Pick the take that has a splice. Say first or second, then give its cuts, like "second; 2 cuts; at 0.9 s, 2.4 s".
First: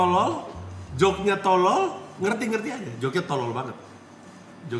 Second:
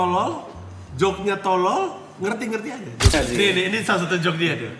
second; 1 cut; at 3.1 s